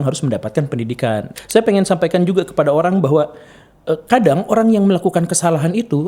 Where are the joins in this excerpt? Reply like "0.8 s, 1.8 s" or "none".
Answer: 1.4 s